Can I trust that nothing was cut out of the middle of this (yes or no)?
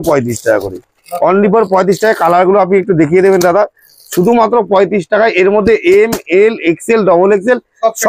yes